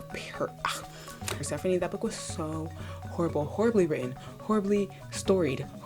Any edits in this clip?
yes; 1 cut; at 1.4 s

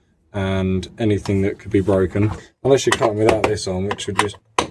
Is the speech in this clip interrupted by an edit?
yes; 1 cut; at 2.4 s

